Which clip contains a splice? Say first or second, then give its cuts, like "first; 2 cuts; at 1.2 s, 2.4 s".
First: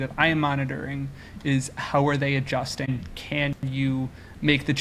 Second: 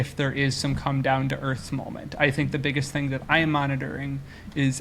first; 1 cut; at 2.9 s